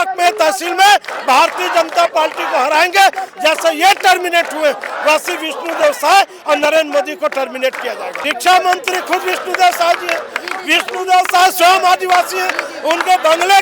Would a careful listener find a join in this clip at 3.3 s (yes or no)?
no